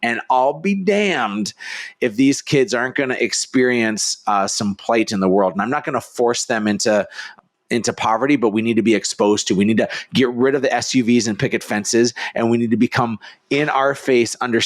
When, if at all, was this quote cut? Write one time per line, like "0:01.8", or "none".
0:07.3